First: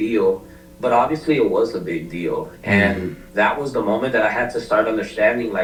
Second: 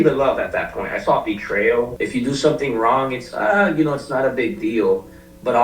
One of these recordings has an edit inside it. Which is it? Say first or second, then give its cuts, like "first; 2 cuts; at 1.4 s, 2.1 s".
second; 1 cut; at 1.9 s